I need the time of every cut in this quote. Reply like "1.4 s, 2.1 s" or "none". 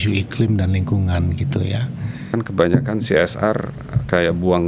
2.3 s

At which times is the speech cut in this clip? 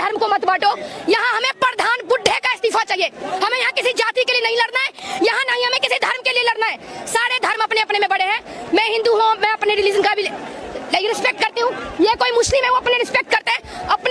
none

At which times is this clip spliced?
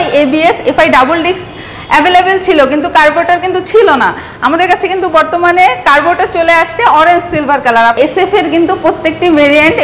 7.9 s

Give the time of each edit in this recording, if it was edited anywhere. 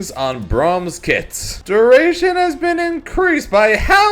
1.5 s

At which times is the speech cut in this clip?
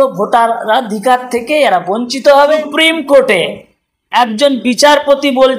2.6 s

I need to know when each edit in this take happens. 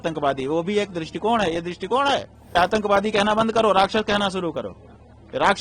2.5 s

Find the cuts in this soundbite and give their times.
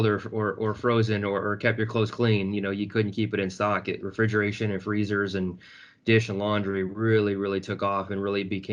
none

